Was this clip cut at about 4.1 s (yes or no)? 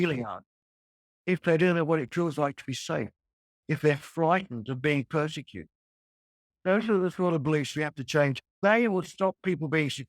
no